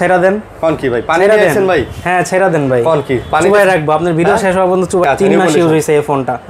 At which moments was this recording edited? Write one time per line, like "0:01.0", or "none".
0:05.0